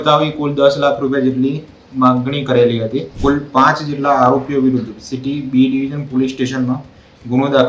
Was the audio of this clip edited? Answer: yes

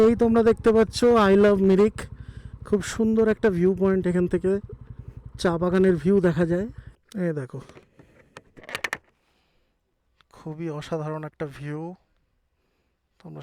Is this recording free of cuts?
no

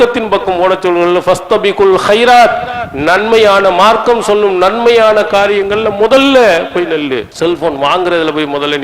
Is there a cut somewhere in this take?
yes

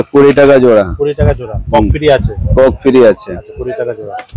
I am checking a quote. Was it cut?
no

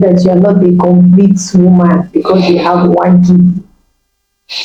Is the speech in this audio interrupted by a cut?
no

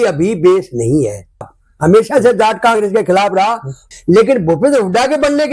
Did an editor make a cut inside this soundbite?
yes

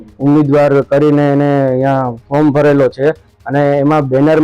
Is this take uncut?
yes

